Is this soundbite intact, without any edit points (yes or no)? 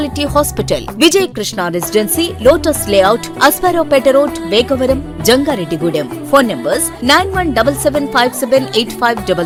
yes